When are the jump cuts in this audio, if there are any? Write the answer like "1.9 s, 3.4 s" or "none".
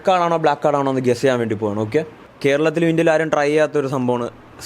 2.3 s